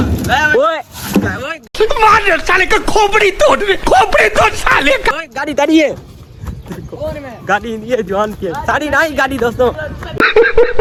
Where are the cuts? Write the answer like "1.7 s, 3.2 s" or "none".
none